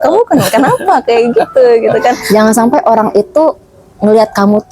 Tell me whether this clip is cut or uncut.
cut